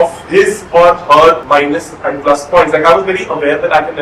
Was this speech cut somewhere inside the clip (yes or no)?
yes